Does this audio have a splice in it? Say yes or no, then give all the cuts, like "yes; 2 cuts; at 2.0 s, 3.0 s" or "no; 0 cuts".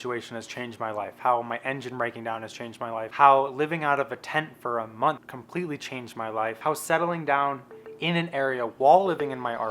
yes; 3 cuts; at 3.1 s, 5.3 s, 6.6 s